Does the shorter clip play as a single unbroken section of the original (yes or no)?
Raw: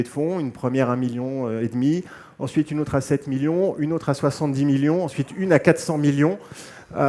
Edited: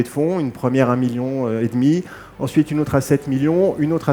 yes